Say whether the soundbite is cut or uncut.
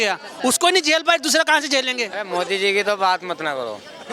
cut